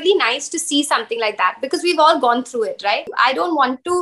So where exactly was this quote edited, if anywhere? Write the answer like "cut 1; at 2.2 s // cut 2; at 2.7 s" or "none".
cut 1; at 3.1 s